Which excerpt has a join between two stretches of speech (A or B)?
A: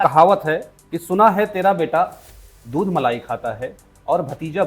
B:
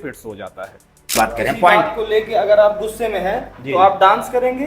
B